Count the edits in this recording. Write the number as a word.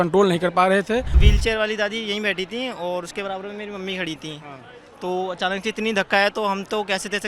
one